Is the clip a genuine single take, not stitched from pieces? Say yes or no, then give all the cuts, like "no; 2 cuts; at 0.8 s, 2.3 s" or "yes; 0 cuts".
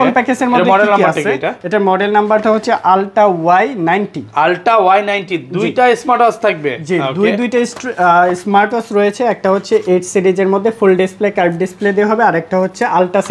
yes; 0 cuts